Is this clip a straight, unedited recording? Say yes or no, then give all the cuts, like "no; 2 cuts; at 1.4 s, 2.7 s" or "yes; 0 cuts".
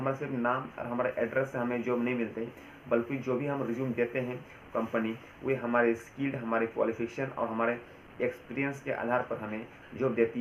yes; 0 cuts